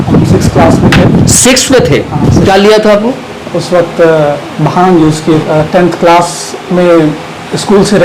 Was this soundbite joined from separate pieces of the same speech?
yes; 1 cut; at 5.4 s

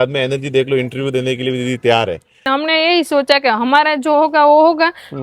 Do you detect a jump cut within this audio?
yes; 1 cut; at 2.5 s

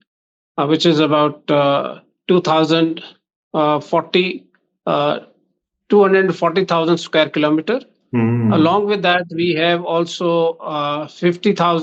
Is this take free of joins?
yes; 0 cuts

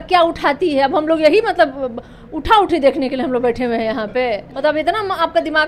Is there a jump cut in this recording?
yes; 1 cut; at 4.5 s

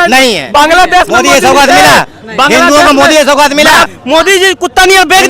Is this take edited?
yes; 1 cut; at 3.9 s

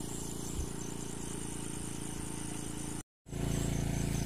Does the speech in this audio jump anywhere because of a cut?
yes; 1 cut; at 3.4 s

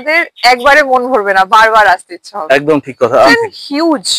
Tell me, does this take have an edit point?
yes; 1 cut; at 3.3 s

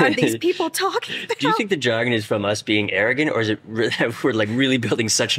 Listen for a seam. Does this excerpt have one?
no; 0 cuts

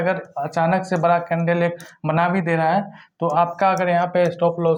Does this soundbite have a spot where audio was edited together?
no; 0 cuts

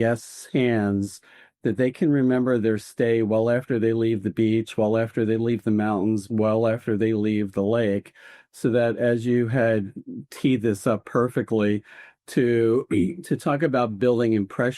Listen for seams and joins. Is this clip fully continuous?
yes; 0 cuts

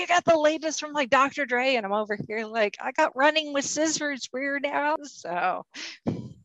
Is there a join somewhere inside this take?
yes; 1 cut; at 5.0 s

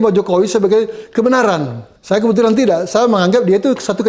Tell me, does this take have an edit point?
no; 0 cuts

